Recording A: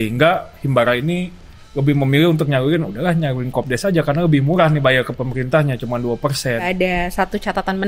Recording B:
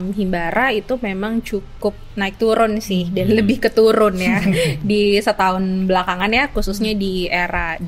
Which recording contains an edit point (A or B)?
A